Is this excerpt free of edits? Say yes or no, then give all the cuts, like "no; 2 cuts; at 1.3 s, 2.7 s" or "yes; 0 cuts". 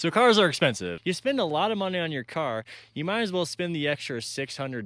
no; 1 cut; at 0.9 s